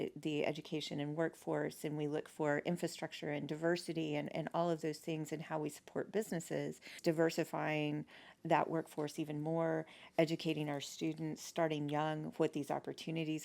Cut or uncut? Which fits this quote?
cut